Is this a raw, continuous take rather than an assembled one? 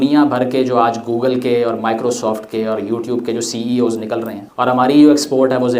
no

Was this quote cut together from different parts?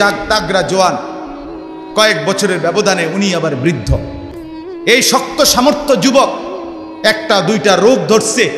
no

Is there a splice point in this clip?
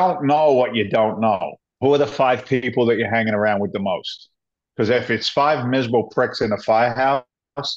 yes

